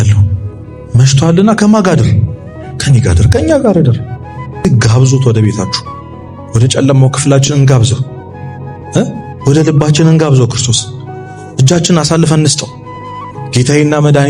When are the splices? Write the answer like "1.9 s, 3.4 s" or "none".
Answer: 4.6 s